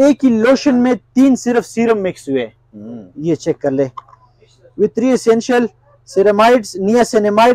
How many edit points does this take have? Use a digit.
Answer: 0